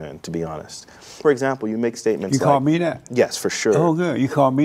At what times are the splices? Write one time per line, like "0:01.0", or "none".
0:01.2

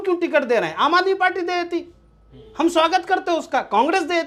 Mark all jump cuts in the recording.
none

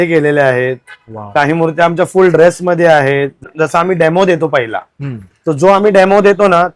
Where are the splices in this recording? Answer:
0:03.5

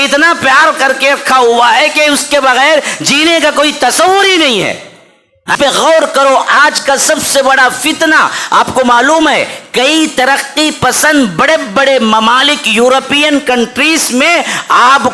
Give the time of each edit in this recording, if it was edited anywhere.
0:05.5

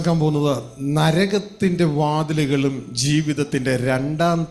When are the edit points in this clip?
none

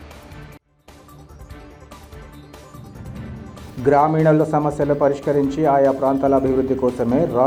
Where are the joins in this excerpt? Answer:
none

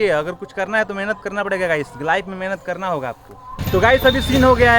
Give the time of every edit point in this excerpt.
0:03.6

